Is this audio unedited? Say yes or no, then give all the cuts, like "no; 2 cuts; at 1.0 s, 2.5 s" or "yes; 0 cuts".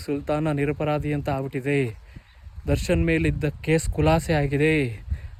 yes; 0 cuts